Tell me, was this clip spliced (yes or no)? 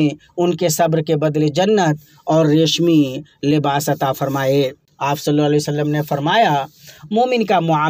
yes